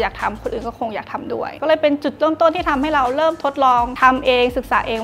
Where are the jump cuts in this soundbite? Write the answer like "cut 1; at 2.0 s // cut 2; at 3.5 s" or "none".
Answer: none

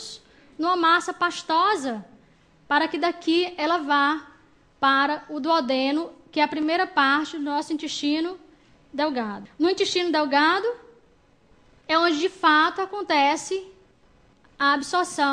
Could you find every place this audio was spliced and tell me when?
cut 1; at 10.0 s

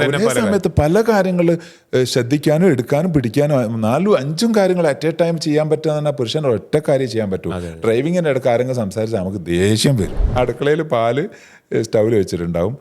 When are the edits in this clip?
cut 1; at 10.3 s

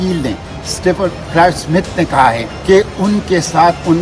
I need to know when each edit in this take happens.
cut 1; at 2.5 s

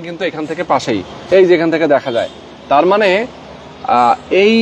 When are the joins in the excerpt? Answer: none

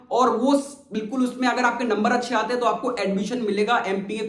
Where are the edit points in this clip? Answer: none

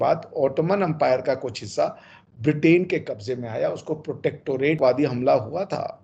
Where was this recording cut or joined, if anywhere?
cut 1; at 4.8 s

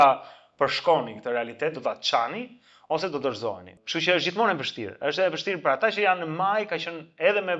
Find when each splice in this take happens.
cut 1; at 3.8 s

